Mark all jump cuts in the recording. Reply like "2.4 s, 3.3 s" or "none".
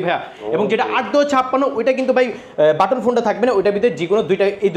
none

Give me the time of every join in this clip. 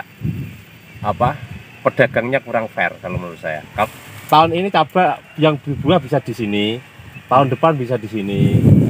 3.8 s

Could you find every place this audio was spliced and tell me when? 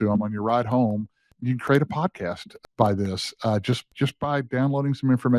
1.3 s, 2.6 s, 3.9 s

